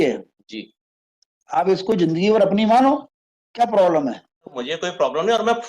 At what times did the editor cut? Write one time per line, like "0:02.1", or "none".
0:04.6